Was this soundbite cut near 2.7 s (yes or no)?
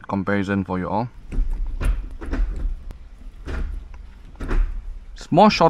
no